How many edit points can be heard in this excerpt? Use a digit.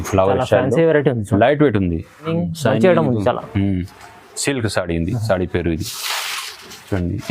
1